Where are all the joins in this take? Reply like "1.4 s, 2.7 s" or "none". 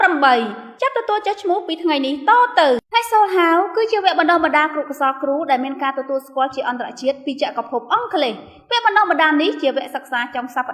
2.9 s